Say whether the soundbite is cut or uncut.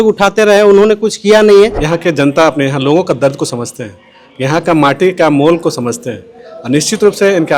cut